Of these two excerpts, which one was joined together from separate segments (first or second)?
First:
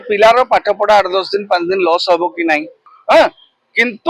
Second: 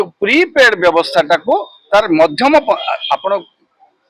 first